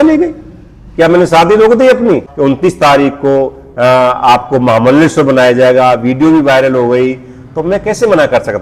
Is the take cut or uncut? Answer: cut